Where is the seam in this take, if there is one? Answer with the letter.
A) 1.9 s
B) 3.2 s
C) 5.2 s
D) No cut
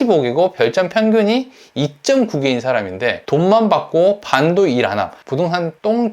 C